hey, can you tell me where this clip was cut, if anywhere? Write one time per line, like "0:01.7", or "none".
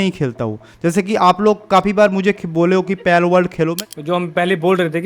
0:03.7